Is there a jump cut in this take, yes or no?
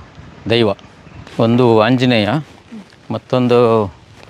yes